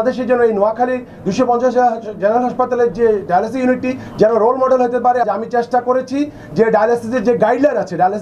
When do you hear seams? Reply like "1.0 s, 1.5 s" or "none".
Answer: 5.2 s